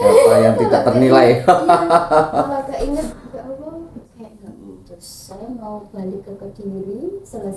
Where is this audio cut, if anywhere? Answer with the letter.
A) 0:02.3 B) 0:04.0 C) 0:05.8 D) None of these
B